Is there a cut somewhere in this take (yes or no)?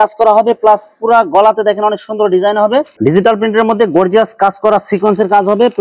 yes